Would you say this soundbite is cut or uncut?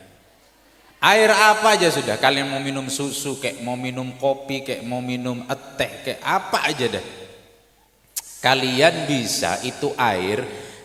uncut